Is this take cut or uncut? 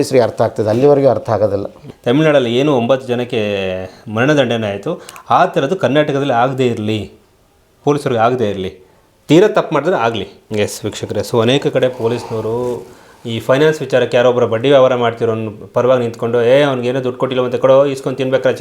cut